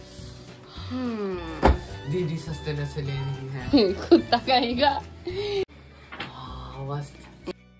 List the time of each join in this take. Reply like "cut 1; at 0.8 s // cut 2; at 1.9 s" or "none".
cut 1; at 5.6 s